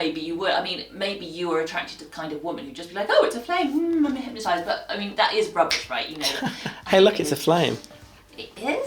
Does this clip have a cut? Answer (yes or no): no